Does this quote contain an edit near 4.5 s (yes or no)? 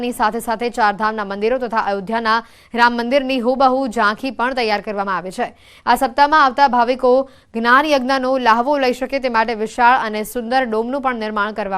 no